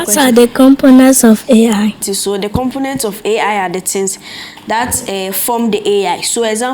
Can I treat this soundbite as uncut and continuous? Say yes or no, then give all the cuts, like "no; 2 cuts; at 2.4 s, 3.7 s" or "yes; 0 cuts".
no; 1 cut; at 2.0 s